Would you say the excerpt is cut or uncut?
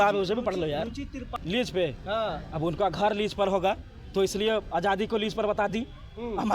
cut